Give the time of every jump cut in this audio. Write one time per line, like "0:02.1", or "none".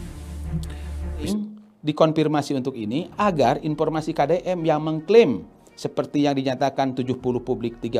0:01.3